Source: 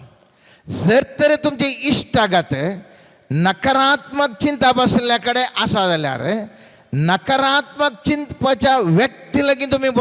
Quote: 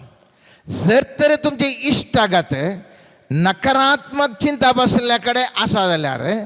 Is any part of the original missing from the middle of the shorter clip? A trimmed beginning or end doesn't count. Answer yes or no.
no